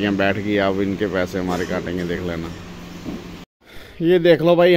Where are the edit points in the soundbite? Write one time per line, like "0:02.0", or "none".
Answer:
0:03.6